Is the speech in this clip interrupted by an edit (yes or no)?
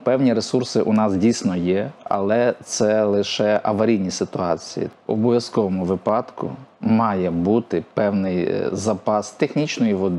yes